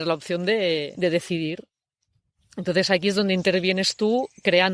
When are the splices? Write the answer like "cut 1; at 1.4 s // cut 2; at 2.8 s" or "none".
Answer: cut 1; at 0.9 s